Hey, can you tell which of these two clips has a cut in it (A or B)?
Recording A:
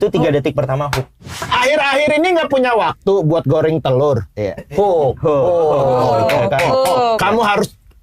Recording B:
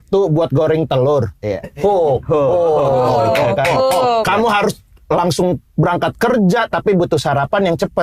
A